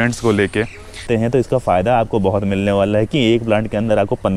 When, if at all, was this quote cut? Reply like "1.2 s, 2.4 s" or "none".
1.1 s